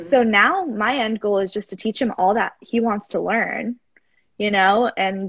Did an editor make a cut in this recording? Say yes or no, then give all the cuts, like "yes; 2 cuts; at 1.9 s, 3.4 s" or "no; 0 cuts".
no; 0 cuts